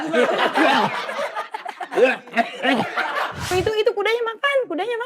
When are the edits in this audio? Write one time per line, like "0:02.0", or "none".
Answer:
0:03.4